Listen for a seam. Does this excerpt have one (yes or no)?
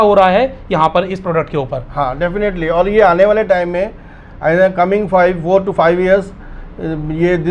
no